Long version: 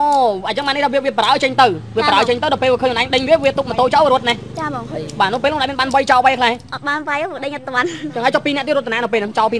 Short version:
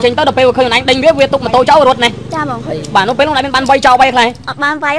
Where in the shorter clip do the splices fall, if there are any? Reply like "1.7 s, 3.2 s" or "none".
none